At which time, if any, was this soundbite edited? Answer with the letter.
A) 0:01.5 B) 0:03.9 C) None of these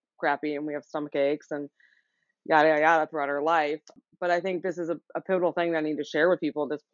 B